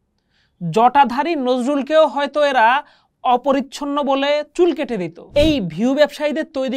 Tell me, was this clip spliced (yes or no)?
yes